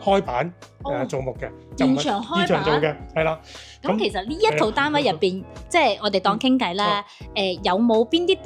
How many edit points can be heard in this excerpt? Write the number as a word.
one